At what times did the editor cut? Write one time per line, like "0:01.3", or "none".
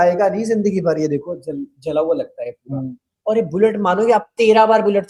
none